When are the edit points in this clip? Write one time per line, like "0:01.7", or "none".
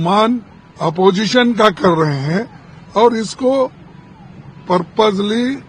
none